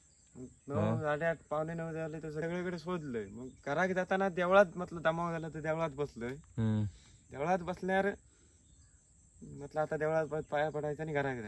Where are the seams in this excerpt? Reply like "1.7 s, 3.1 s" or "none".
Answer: 2.4 s